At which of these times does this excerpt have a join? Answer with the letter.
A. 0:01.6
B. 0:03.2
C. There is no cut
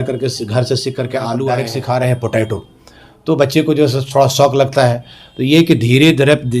A